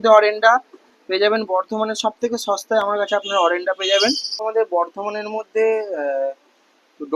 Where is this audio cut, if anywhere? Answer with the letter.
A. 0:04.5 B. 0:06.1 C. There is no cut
A